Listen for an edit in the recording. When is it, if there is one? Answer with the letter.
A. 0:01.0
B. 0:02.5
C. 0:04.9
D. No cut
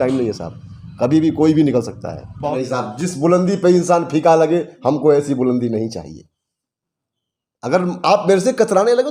B